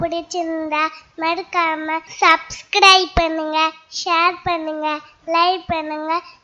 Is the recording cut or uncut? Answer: cut